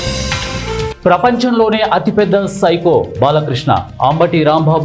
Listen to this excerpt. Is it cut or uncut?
uncut